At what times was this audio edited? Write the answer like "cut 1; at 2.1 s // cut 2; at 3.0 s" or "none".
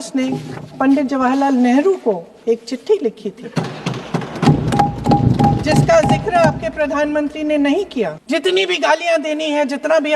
cut 1; at 8.2 s